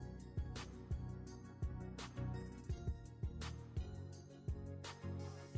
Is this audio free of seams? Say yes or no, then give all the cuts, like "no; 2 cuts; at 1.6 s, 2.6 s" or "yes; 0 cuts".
yes; 0 cuts